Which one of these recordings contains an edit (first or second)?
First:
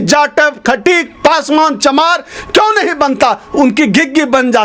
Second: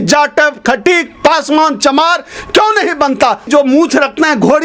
second